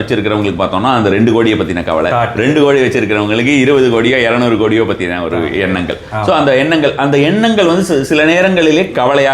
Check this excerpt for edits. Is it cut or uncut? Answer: uncut